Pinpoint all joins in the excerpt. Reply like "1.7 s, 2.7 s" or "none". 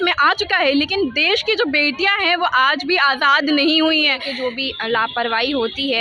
4.3 s